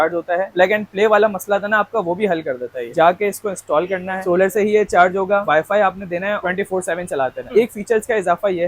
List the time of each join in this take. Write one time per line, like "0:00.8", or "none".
0:02.9
0:05.4
0:07.5